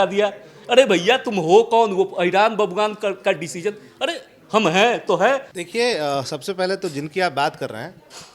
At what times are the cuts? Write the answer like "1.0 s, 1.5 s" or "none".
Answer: 5.5 s